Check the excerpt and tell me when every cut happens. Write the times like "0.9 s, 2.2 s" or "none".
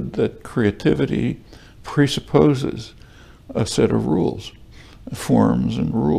none